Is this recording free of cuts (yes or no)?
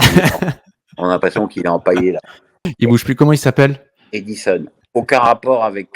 no